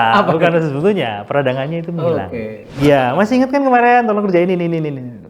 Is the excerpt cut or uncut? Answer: cut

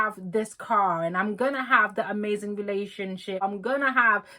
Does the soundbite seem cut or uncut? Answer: cut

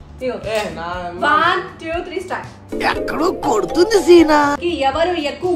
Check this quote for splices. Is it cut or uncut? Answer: cut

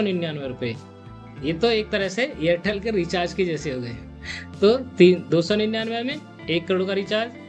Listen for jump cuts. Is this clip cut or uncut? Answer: uncut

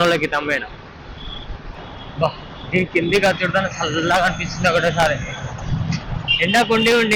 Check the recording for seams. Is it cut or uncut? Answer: cut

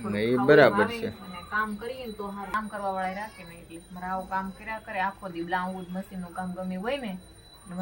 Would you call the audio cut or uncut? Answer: cut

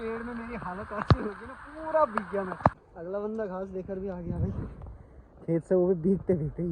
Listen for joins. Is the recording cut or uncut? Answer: cut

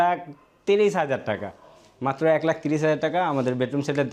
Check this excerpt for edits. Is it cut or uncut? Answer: uncut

